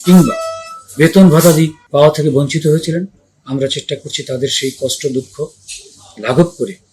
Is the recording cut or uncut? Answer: cut